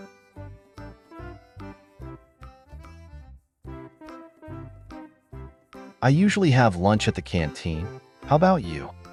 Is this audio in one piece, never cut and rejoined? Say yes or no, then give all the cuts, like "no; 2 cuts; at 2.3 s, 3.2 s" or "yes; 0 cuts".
yes; 0 cuts